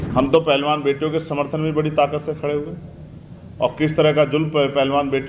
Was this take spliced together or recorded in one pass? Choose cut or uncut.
uncut